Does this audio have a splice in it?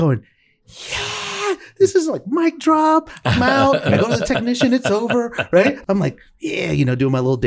yes; 1 cut; at 5.8 s

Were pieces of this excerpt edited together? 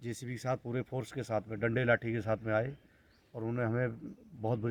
no; 0 cuts

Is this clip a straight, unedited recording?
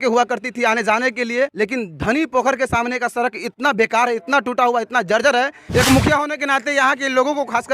no; 2 cuts; at 1.5 s, 5.5 s

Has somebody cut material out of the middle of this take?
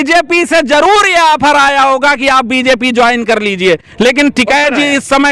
no; 0 cuts

